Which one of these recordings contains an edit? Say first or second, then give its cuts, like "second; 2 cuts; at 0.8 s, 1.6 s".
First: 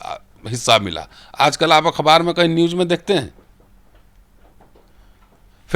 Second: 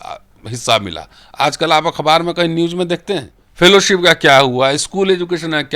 second; 1 cut; at 3.4 s